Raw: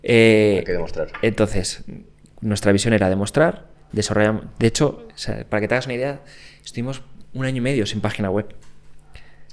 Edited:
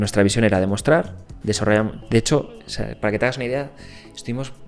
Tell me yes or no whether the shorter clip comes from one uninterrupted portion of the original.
yes